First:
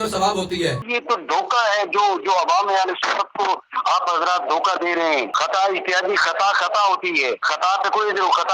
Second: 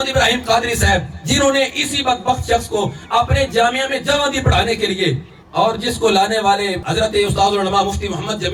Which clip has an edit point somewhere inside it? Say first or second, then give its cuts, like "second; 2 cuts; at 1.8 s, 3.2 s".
first; 3 cuts; at 0.9 s, 5.3 s, 7.5 s